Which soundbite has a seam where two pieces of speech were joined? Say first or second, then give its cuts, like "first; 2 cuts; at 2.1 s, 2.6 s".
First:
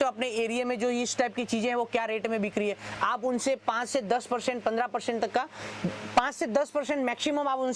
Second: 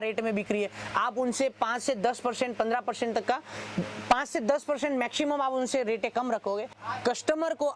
second; 1 cut; at 6.8 s